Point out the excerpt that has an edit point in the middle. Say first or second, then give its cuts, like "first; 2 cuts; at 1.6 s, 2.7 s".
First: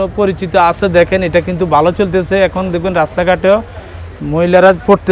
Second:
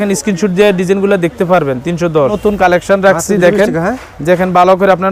second; 1 cut; at 2.4 s